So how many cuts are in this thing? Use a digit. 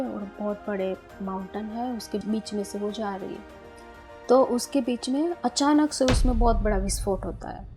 1